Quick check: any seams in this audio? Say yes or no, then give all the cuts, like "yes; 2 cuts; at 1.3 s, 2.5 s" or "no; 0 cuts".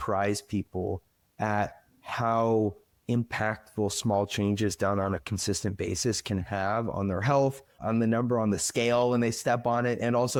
no; 0 cuts